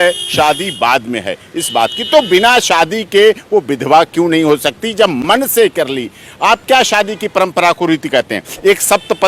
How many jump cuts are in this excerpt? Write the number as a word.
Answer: zero